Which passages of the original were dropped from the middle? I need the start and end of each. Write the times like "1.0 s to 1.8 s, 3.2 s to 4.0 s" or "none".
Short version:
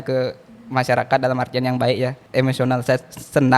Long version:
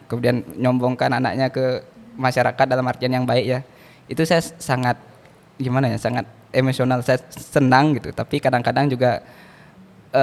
3.7 s to 6.4 s